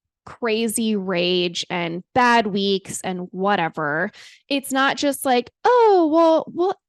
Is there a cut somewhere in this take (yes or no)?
no